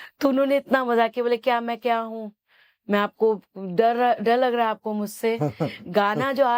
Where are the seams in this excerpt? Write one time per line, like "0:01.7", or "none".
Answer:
none